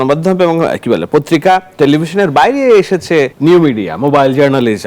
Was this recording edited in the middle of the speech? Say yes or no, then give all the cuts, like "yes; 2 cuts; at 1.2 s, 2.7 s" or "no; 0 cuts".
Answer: yes; 1 cut; at 3.3 s